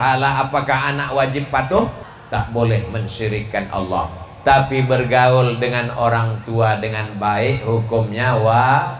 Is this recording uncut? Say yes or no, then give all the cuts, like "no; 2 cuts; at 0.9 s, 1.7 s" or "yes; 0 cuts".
no; 1 cut; at 2.1 s